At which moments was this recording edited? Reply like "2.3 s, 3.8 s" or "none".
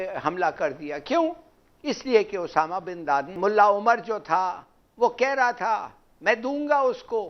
3.4 s